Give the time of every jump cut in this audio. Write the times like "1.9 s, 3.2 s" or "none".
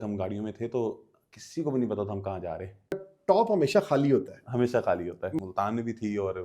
3.1 s, 5.3 s